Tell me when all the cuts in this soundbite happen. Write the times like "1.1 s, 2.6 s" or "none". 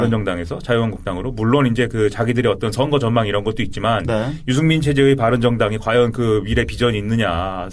none